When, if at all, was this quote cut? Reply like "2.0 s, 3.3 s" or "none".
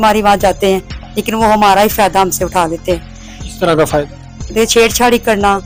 none

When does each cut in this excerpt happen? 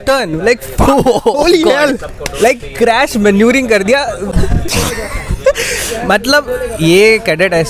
none

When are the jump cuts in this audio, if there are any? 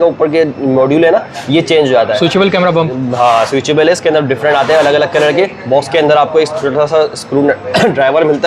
none

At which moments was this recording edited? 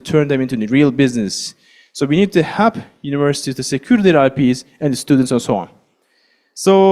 none

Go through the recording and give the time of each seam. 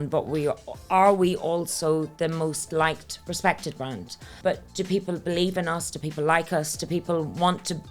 4.3 s

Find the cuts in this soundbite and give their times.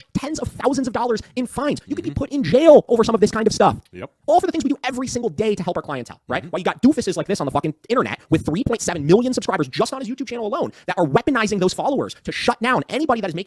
none

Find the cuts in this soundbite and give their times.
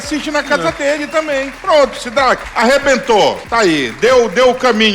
1.5 s, 2.5 s, 3.4 s

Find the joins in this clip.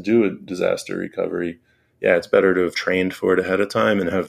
2.8 s

